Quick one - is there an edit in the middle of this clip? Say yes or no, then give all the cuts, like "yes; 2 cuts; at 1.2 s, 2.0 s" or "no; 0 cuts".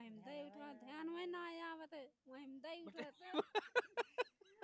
no; 0 cuts